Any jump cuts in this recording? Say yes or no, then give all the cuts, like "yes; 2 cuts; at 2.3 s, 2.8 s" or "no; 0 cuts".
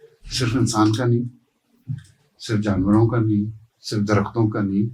no; 0 cuts